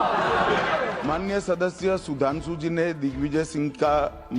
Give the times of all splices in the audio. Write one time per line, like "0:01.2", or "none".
0:01.0